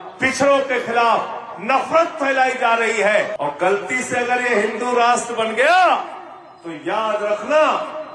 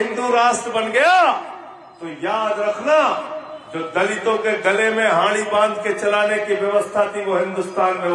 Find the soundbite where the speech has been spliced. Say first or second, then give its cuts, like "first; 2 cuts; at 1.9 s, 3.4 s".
first; 1 cut; at 3.3 s